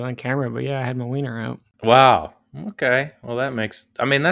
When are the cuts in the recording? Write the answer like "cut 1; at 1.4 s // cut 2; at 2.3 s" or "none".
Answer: cut 1; at 1.6 s